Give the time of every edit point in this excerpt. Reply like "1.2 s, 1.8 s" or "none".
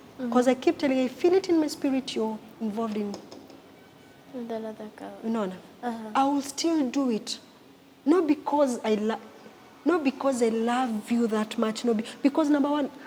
none